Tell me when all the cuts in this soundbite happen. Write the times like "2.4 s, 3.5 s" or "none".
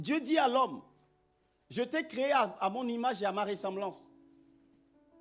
none